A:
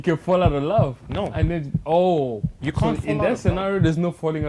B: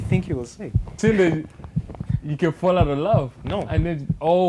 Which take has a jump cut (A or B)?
B